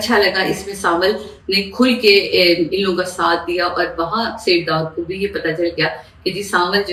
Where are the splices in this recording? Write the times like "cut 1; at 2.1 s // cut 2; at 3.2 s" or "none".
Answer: none